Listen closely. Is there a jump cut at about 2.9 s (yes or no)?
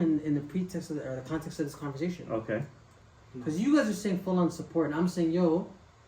yes